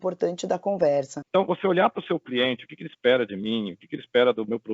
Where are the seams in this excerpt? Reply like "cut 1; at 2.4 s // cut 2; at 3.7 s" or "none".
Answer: cut 1; at 1.2 s